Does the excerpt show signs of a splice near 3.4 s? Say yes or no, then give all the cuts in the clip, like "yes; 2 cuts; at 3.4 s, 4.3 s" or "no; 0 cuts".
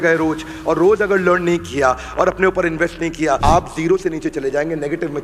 yes; 1 cut; at 3.4 s